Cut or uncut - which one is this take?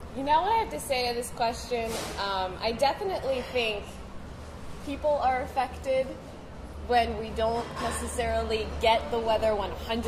uncut